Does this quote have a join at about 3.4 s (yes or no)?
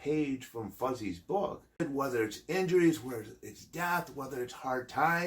no